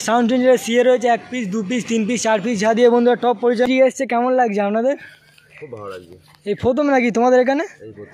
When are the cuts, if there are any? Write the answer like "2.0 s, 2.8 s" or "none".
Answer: 3.7 s